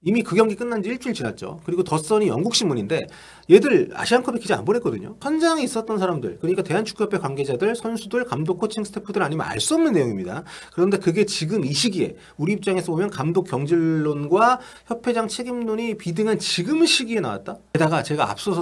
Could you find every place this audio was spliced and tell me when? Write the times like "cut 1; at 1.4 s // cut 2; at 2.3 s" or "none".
cut 1; at 5.2 s // cut 2; at 17.5 s